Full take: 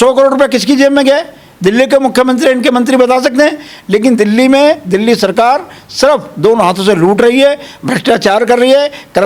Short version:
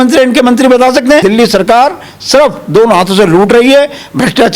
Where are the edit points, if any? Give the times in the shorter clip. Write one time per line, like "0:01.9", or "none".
0:01.2